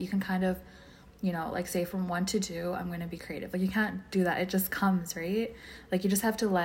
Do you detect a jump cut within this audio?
no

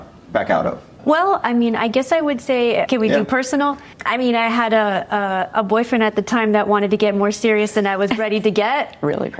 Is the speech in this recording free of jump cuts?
no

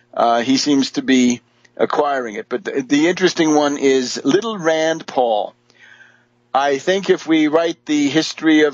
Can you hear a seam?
no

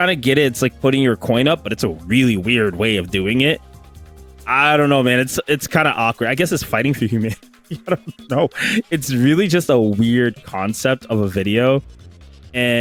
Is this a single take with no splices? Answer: yes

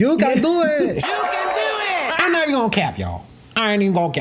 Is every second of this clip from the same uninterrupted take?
no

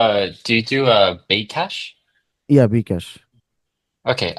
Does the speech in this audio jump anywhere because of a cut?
no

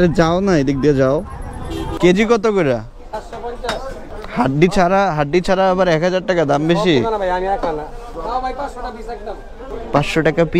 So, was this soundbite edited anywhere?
yes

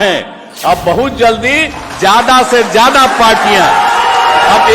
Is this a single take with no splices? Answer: yes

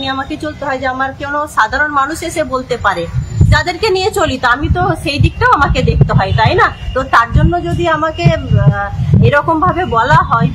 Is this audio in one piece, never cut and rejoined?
yes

